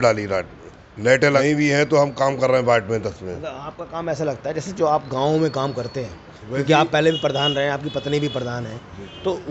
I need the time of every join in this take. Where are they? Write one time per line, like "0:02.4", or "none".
0:01.4